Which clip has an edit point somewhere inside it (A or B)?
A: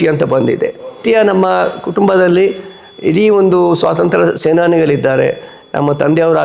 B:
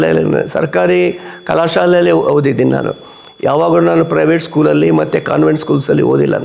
A